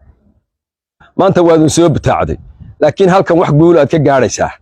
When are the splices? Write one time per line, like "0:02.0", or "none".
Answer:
0:01.1